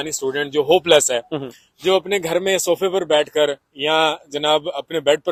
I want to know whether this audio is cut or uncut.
uncut